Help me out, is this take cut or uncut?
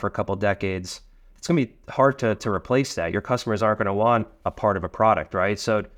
cut